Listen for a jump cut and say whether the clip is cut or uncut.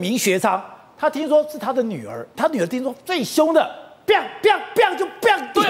uncut